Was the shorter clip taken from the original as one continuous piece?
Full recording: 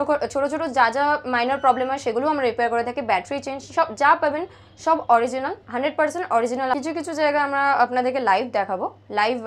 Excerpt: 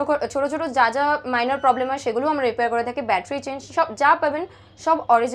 yes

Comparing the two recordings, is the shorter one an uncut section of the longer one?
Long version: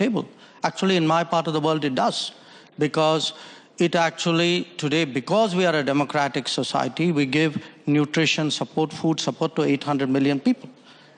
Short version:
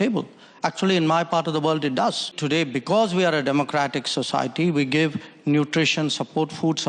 no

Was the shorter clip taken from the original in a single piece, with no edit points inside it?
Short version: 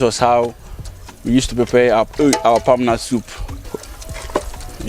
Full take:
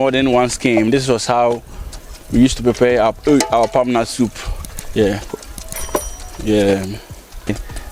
no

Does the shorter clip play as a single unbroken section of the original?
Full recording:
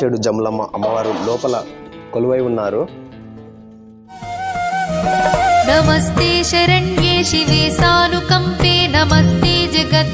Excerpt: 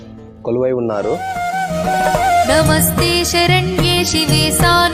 no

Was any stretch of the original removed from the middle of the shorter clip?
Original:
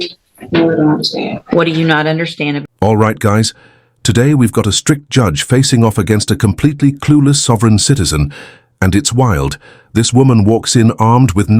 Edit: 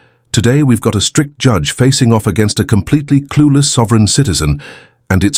no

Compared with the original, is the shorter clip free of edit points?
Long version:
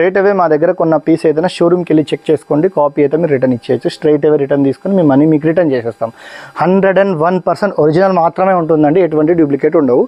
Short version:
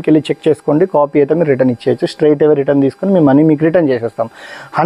yes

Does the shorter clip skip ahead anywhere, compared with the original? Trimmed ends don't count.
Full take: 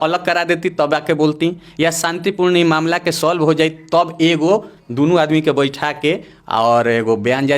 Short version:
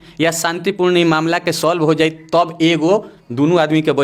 no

